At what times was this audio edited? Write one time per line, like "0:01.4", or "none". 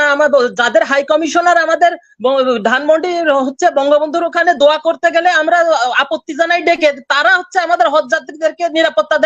none